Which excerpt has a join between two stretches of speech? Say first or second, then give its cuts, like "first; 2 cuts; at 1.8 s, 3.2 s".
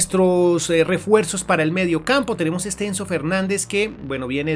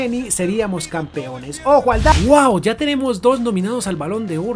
second; 1 cut; at 2.1 s